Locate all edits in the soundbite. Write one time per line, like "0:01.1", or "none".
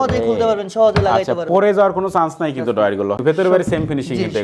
0:03.2